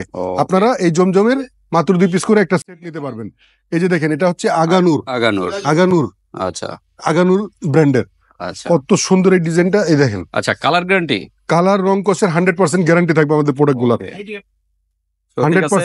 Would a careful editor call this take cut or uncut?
uncut